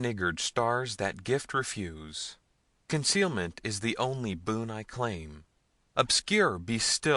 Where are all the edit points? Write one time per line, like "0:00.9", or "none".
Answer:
0:06.2

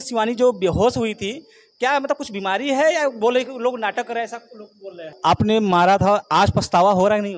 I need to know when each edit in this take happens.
0:05.2

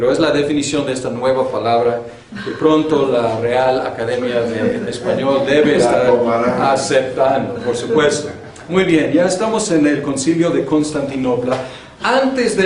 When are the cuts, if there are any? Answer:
0:05.1

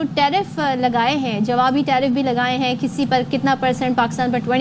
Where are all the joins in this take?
none

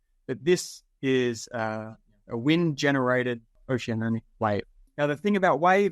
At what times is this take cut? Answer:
0:03.5
0:04.8

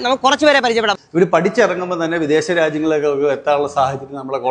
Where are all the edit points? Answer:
0:01.0

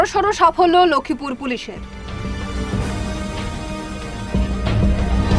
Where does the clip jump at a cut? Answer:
none

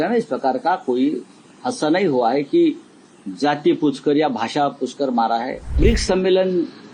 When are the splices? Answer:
0:05.8

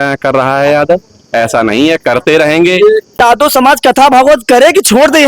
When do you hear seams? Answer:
0:03.1

